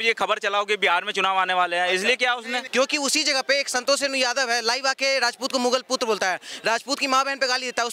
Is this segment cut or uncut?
cut